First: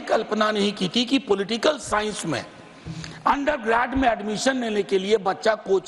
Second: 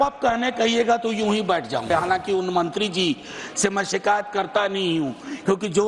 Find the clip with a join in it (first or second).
second